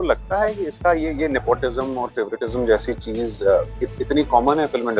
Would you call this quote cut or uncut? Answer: uncut